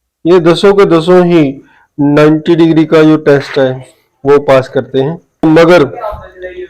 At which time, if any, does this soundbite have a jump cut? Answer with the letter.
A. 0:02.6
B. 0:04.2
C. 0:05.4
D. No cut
C